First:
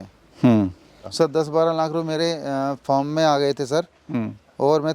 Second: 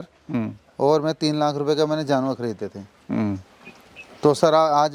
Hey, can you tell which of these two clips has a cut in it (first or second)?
first